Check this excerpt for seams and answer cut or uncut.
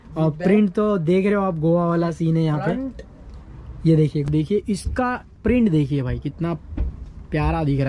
cut